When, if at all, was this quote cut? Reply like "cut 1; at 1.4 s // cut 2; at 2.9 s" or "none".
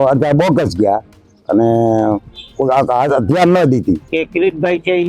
cut 1; at 4.0 s